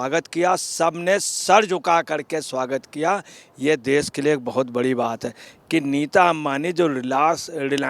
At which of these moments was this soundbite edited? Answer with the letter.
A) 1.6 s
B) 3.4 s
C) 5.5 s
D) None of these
C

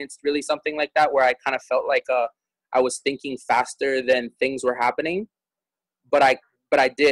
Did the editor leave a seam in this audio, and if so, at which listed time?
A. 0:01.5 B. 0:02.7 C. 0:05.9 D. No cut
D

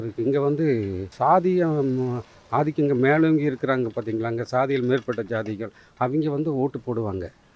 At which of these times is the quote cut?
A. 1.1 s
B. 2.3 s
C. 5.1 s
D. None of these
A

